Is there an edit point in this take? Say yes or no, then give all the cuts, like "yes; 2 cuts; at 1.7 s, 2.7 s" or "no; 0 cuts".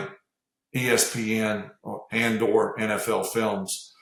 no; 0 cuts